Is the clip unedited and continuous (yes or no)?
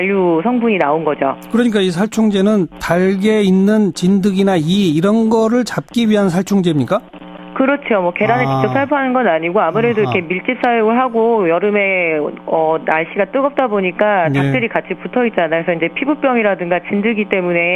yes